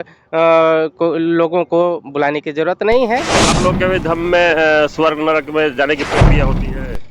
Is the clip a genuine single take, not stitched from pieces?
no; 1 cut; at 3.5 s

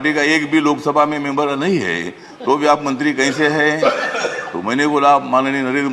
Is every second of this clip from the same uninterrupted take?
yes; 0 cuts

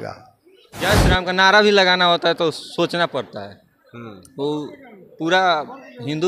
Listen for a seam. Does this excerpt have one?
yes; 1 cut; at 1.0 s

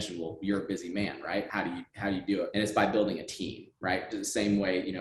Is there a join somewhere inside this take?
yes; 2 cuts; at 1.5 s, 2.5 s

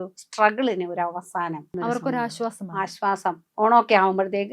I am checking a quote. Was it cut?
yes; 2 cuts; at 1.7 s, 3.5 s

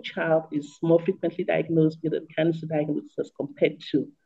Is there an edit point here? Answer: no; 0 cuts

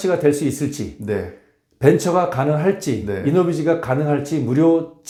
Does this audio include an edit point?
no; 0 cuts

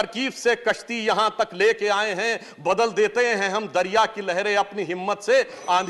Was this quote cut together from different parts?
no; 0 cuts

